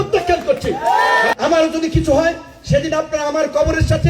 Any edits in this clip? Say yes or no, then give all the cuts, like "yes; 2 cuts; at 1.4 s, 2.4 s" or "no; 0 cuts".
yes; 1 cut; at 1.3 s